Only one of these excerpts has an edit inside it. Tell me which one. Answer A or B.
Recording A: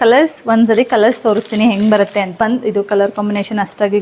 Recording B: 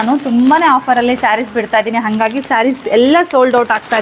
A